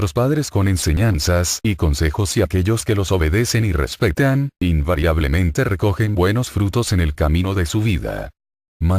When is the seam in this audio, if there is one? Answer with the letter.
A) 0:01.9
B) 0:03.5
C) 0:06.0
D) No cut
B